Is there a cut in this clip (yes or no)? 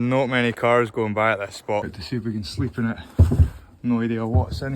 yes